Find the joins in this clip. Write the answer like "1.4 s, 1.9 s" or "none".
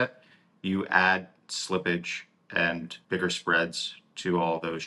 2.9 s